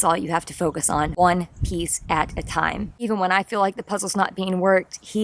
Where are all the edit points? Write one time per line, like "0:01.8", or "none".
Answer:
0:02.9

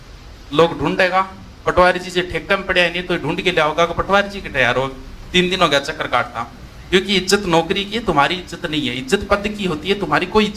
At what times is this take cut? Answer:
none

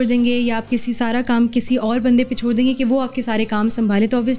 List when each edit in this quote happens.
none

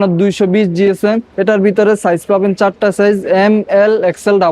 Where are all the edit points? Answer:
0:01.3

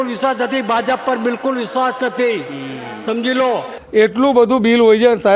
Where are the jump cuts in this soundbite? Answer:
0:03.7

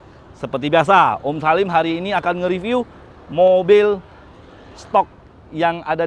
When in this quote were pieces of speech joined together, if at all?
none

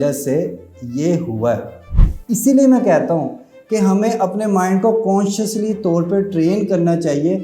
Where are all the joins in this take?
0:02.0

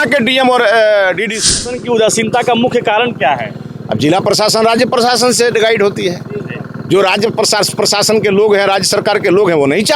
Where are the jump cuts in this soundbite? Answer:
0:01.7

